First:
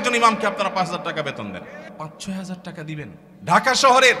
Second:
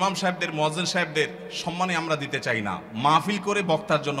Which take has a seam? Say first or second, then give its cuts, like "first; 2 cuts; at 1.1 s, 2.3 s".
first; 2 cuts; at 1.9 s, 3.2 s